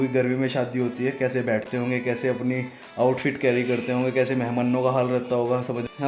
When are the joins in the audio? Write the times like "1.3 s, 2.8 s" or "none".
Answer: none